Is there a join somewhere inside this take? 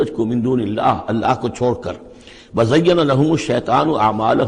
no; 0 cuts

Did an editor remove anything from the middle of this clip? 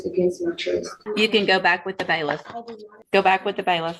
yes; 2 cuts; at 1.0 s, 3.0 s

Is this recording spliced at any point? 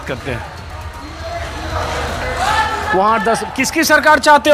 no; 0 cuts

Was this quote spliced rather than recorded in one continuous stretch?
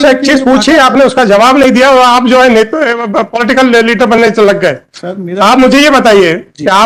no; 0 cuts

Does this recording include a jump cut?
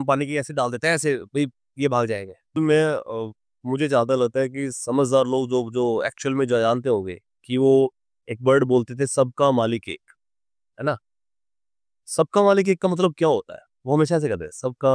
yes; 1 cut; at 2.6 s

